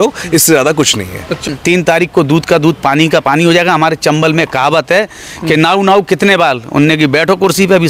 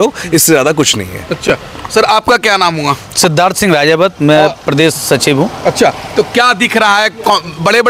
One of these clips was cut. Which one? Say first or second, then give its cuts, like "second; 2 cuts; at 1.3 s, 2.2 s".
first; 1 cut; at 1.3 s